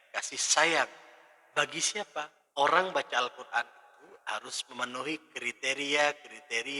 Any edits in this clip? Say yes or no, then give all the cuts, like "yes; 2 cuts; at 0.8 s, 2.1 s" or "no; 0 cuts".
yes; 1 cut; at 2.4 s